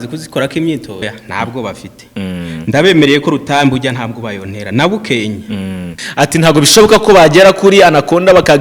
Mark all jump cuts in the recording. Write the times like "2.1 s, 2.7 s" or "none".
1.0 s, 6.0 s